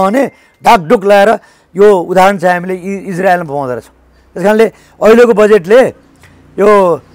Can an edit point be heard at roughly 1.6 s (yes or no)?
no